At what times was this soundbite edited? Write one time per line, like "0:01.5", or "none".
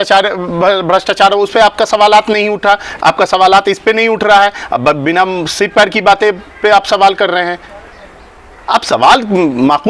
none